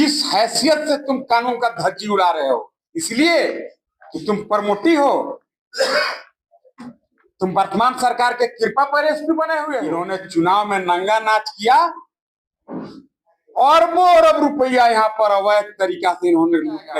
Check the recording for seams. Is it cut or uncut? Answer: cut